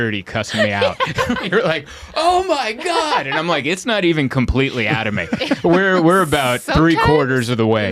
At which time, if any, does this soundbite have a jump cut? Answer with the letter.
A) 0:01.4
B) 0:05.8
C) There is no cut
A